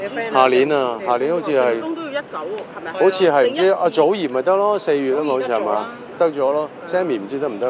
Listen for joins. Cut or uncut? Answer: cut